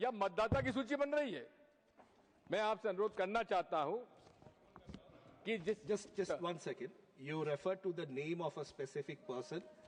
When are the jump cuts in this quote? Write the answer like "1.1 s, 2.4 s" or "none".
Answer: none

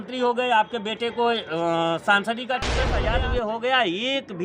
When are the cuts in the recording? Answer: 3.0 s

